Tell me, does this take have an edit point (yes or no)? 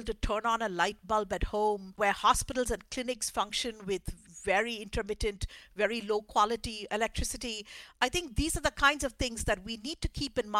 yes